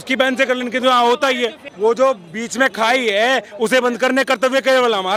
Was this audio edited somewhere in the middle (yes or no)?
yes